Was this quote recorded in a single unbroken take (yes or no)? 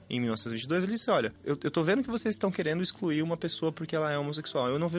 no